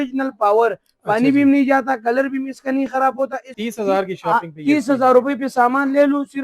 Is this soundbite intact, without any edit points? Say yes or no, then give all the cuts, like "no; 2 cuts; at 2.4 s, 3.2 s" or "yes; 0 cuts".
no; 1 cut; at 3.6 s